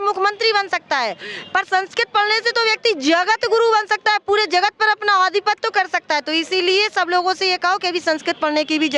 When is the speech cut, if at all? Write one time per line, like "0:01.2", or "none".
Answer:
none